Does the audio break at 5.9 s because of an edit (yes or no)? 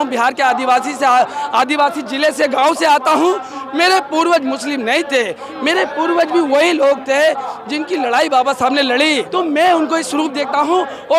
no